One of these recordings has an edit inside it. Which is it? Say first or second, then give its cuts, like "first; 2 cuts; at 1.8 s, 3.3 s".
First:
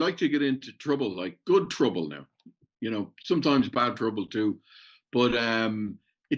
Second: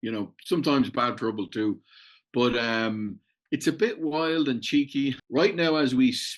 second; 1 cut; at 5.2 s